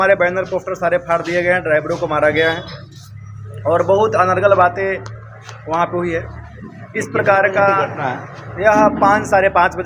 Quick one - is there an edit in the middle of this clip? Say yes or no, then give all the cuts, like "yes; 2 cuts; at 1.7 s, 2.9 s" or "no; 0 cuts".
no; 0 cuts